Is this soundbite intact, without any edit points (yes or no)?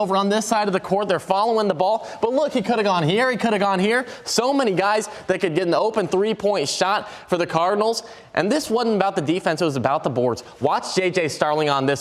yes